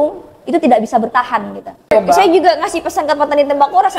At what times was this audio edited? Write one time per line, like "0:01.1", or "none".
0:01.9